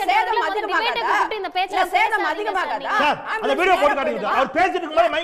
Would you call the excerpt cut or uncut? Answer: uncut